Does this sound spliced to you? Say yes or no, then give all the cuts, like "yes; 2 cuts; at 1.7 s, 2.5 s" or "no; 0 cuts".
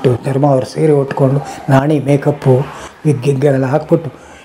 no; 0 cuts